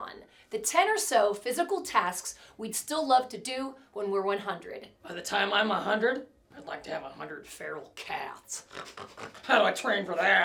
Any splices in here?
no; 0 cuts

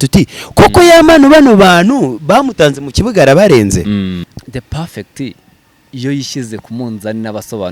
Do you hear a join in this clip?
yes; 1 cut; at 4.2 s

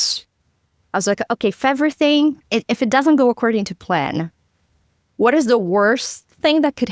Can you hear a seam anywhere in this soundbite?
no; 0 cuts

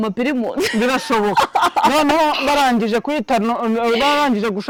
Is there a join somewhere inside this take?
no; 0 cuts

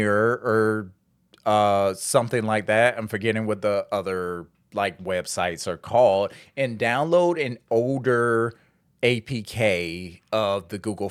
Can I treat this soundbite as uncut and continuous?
yes; 0 cuts

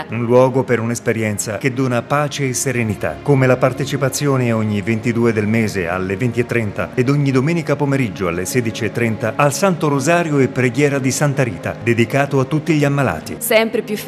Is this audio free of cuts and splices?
yes; 0 cuts

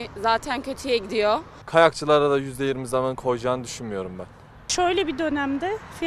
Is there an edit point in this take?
yes; 2 cuts; at 1.5 s, 4.6 s

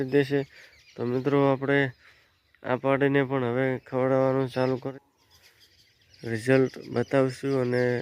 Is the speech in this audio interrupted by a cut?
yes; 1 cut; at 4.9 s

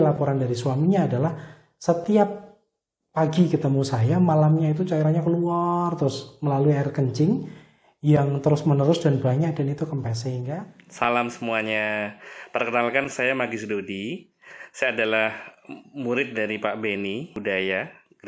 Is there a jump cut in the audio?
yes; 2 cuts; at 10.5 s, 17.3 s

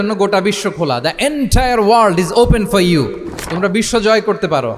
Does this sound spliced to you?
no; 0 cuts

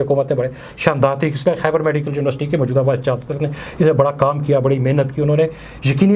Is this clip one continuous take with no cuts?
yes; 0 cuts

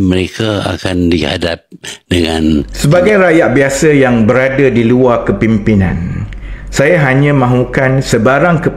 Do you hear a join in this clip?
yes; 1 cut; at 2.7 s

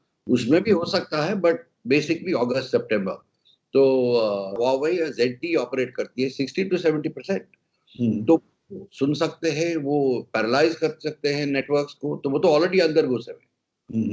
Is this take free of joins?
no; 1 cut; at 4.6 s

